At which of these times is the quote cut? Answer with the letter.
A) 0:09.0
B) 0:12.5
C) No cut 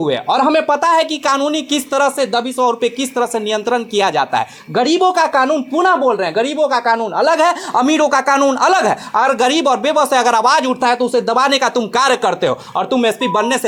C